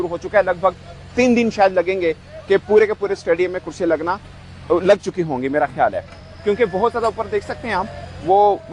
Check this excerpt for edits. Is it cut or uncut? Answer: uncut